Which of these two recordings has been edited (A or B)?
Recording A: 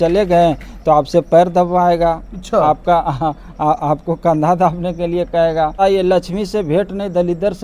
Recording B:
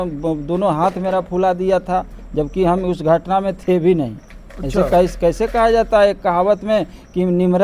A